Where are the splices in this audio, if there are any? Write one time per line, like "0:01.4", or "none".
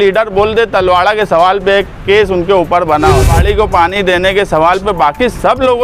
0:03.3